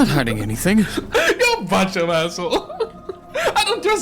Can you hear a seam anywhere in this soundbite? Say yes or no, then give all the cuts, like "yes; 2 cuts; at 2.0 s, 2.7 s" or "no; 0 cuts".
yes; 1 cut; at 1.0 s